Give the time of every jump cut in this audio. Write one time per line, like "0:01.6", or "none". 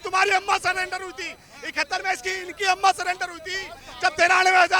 none